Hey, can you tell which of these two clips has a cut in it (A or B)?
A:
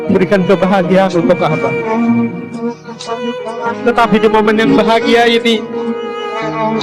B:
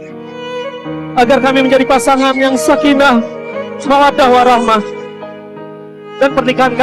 B